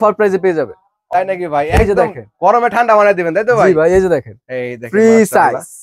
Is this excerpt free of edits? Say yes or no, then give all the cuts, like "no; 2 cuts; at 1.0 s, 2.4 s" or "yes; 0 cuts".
no; 1 cut; at 1.0 s